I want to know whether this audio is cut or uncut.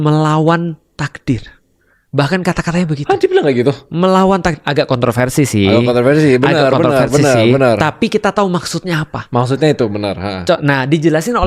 uncut